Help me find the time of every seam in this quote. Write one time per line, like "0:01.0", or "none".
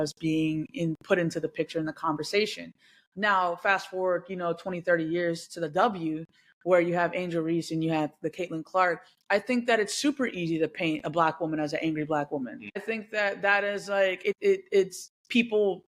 0:12.8
0:14.4